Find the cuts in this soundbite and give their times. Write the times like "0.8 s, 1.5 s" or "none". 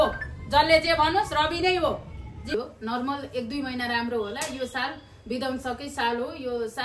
2.5 s